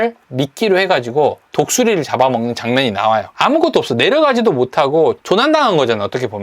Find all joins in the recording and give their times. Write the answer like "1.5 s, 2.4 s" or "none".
1.4 s, 3.3 s, 5.2 s